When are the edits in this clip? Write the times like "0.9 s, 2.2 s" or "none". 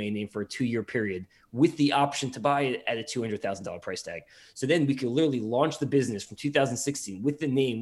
none